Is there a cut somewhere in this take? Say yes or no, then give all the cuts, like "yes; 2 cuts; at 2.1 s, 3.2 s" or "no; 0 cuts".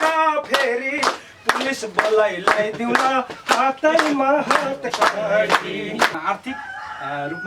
yes; 1 cut; at 6.2 s